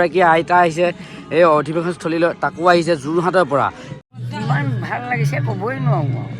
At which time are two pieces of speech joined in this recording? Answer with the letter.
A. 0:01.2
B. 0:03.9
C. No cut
B